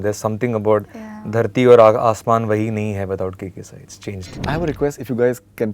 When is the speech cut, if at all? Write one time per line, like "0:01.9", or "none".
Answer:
0:04.3